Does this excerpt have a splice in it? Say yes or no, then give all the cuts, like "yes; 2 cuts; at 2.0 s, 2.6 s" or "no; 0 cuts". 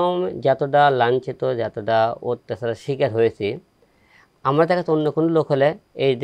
no; 0 cuts